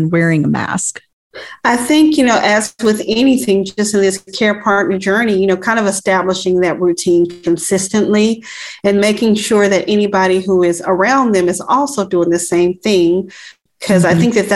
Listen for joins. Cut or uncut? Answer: uncut